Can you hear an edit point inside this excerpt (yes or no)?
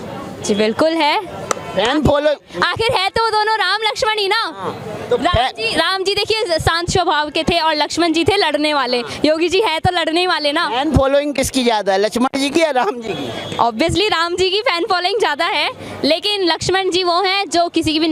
no